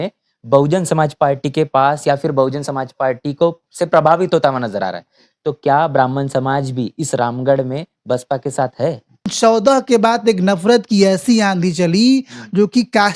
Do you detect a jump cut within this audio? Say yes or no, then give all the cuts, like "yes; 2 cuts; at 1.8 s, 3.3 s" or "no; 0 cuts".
yes; 1 cut; at 9.3 s